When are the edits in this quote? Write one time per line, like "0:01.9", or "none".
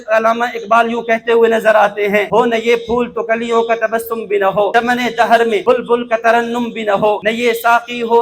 0:02.3
0:04.7
0:05.6
0:07.2